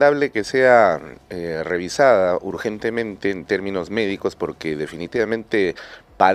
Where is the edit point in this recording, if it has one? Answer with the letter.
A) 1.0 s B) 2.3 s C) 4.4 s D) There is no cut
D